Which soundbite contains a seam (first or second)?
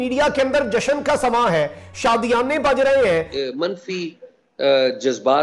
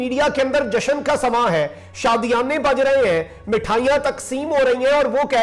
first